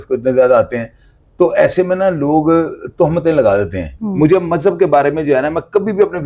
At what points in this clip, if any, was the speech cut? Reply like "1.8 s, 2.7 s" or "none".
3.9 s